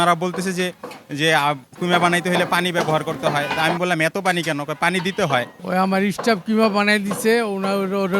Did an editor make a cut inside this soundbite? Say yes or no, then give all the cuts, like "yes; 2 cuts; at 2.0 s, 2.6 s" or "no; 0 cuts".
yes; 1 cut; at 5.6 s